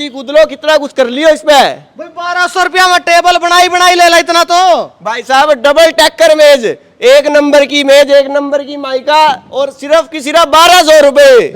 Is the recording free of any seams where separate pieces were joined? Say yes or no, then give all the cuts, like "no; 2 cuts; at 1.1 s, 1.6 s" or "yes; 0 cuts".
yes; 0 cuts